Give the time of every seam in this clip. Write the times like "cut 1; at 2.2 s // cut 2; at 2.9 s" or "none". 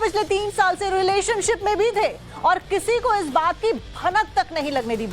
cut 1; at 3.6 s